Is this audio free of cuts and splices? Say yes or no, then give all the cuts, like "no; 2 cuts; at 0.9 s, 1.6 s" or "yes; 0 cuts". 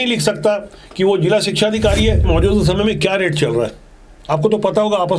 no; 1 cut; at 2.3 s